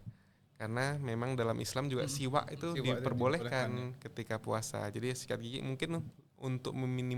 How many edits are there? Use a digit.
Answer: 0